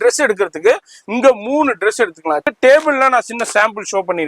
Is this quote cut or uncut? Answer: cut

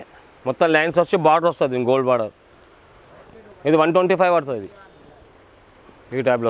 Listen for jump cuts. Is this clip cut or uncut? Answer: uncut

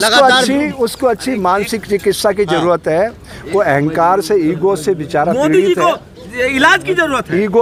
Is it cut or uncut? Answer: uncut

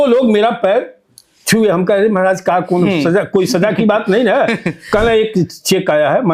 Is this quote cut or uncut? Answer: uncut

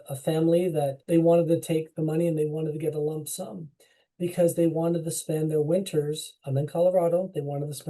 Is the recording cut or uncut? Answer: cut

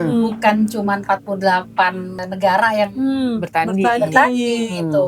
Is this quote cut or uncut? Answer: cut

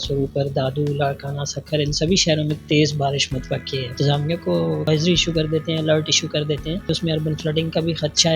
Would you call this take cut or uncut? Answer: cut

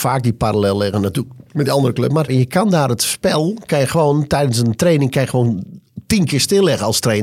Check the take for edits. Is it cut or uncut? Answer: cut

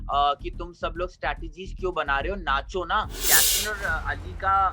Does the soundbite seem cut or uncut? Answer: cut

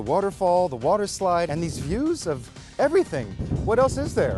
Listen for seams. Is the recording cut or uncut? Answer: cut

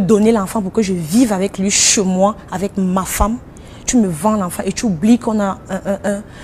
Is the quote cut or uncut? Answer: uncut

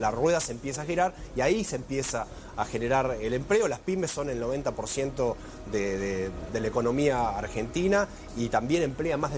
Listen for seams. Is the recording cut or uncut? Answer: uncut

